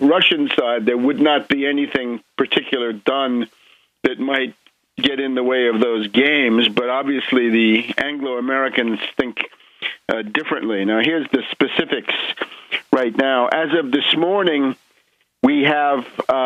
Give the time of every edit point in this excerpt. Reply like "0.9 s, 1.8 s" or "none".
none